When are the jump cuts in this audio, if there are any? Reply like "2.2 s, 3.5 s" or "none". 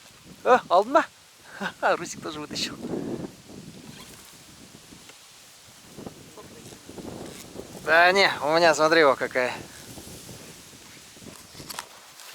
11.3 s